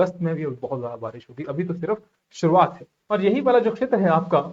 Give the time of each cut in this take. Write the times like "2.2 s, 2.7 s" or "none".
2.9 s